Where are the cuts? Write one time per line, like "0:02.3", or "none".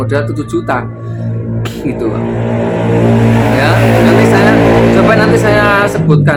none